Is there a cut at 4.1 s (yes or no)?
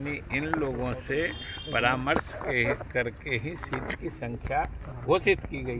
no